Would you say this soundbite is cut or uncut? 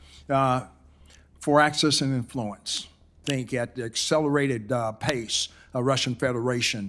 cut